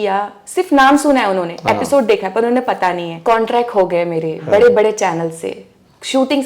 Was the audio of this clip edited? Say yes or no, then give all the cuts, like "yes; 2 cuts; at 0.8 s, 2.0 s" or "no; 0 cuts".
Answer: yes; 1 cut; at 3.1 s